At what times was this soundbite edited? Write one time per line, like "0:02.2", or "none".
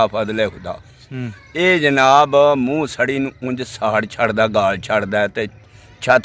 0:01.0